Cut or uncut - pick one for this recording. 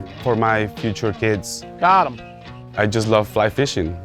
cut